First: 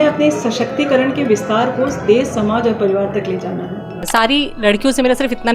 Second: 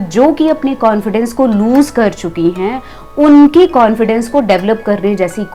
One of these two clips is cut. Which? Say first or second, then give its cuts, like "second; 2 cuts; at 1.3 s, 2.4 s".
first; 1 cut; at 3.8 s